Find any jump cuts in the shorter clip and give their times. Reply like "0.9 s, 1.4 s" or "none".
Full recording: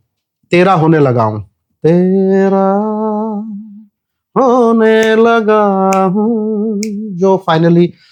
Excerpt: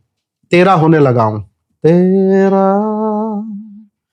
none